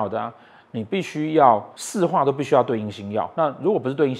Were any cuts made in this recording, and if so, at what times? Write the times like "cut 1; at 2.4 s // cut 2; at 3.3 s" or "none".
cut 1; at 1.8 s // cut 2; at 3.3 s